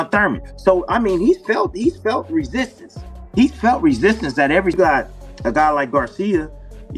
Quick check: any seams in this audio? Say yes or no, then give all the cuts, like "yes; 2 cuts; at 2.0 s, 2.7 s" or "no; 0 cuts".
yes; 1 cut; at 4.7 s